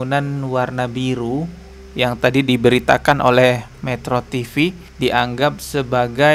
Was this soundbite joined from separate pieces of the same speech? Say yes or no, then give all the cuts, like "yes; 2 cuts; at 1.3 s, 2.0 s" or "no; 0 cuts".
no; 0 cuts